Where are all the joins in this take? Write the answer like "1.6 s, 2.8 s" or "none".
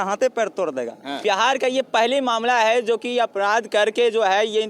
1.2 s